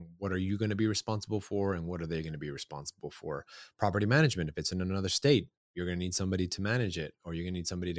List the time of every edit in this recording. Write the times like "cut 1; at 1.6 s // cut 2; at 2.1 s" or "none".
none

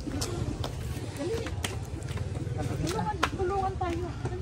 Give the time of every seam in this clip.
none

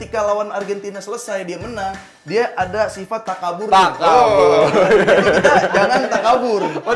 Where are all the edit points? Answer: none

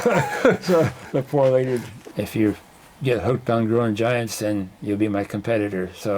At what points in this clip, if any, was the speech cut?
cut 1; at 2.0 s

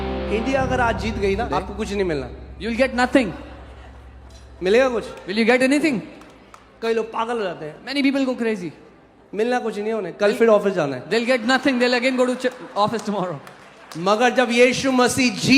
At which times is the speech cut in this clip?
cut 1; at 1.5 s

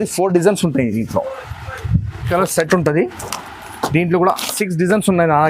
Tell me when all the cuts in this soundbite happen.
cut 1; at 2.2 s

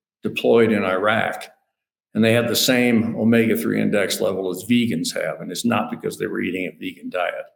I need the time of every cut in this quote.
none

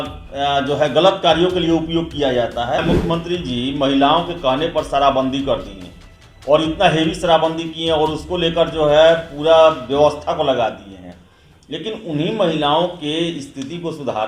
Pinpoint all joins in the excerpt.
cut 1; at 2.8 s

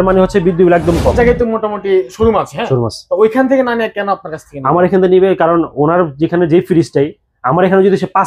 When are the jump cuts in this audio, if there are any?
cut 1; at 1.1 s

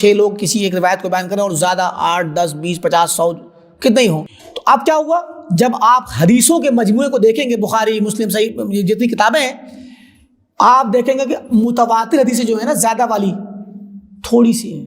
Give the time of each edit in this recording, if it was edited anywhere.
cut 1; at 4.3 s

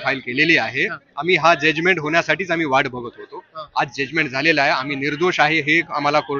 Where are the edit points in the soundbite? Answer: none

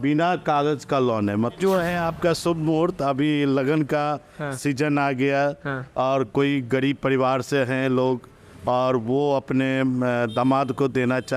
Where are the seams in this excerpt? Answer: cut 1; at 1.6 s

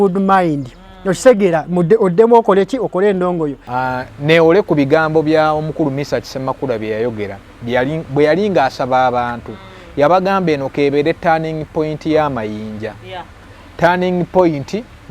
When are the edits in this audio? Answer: cut 1; at 3.6 s

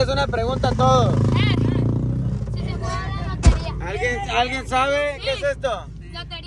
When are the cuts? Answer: none

